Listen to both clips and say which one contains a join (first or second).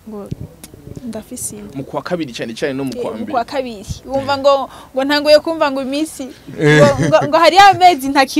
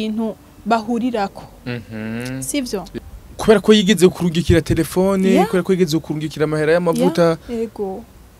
second